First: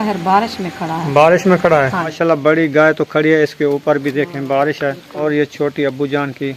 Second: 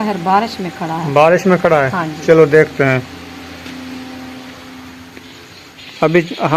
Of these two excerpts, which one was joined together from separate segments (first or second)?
first